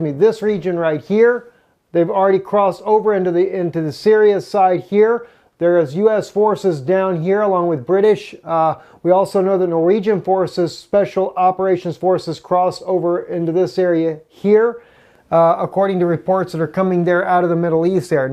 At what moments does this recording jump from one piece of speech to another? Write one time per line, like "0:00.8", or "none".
0:09.7